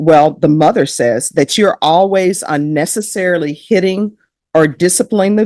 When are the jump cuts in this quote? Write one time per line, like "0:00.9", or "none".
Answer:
none